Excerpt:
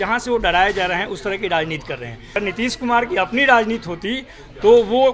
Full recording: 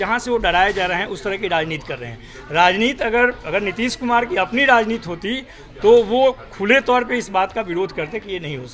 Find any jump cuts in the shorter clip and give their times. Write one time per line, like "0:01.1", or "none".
0:02.3

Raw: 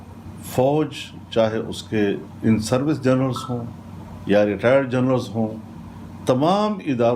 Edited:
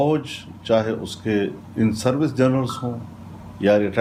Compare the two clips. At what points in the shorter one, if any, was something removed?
none

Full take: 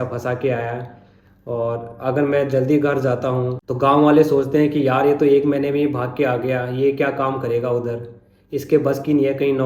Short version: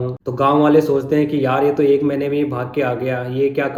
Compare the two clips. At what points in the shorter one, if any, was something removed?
none

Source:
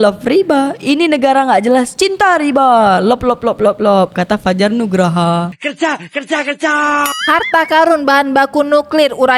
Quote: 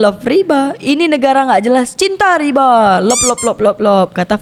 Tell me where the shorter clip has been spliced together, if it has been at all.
none

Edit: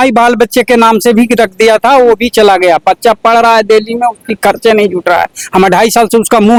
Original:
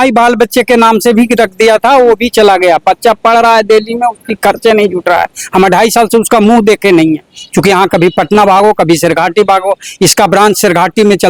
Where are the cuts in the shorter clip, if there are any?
none

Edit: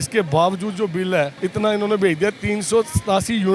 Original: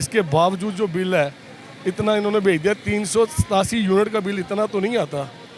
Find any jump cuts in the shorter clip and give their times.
0:01.3

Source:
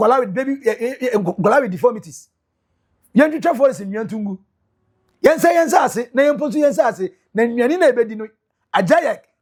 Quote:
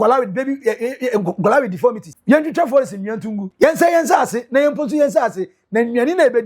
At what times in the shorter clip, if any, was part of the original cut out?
0:02.1
0:03.4

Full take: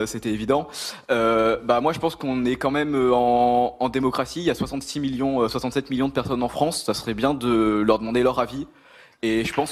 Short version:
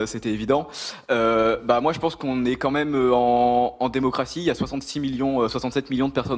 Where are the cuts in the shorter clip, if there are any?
none

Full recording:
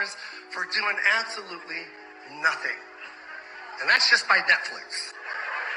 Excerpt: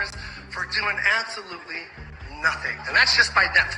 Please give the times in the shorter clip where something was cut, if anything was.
0:02.8

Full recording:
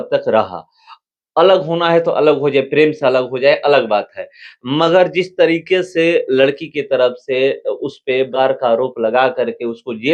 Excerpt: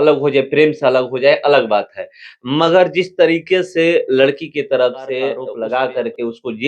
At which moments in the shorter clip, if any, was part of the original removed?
0:05.5

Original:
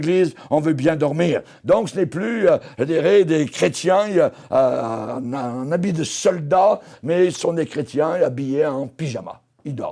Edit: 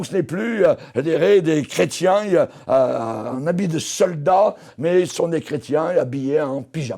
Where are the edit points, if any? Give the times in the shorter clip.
0:03.3

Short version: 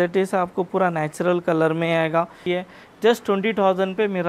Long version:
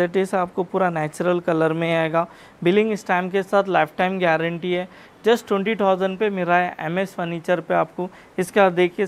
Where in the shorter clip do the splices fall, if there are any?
0:02.4

